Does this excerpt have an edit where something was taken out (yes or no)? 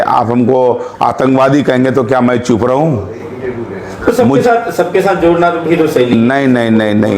no